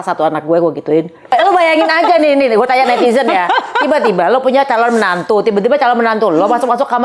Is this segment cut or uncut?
cut